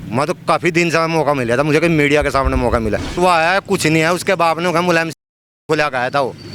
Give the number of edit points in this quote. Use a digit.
1